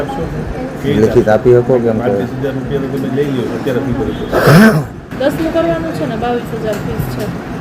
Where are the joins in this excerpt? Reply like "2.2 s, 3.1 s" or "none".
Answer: 5.0 s